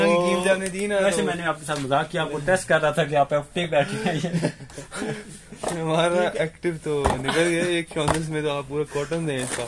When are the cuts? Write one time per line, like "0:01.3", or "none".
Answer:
none